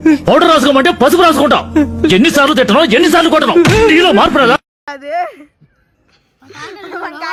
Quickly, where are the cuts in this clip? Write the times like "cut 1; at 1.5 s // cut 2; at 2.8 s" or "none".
none